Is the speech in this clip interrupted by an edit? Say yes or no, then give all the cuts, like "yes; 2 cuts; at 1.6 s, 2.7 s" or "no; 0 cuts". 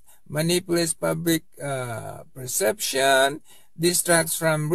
no; 0 cuts